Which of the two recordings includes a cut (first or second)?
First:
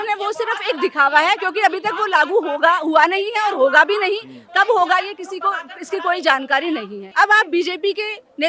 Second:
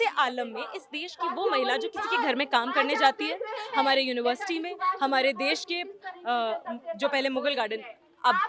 first